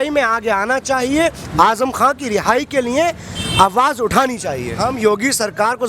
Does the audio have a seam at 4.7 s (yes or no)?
yes